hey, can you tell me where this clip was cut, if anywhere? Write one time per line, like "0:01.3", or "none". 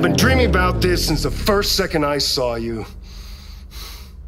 none